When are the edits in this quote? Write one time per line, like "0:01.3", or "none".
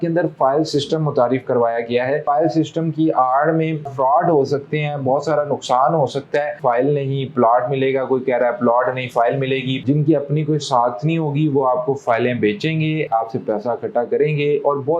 0:02.2
0:03.9
0:06.6
0:09.7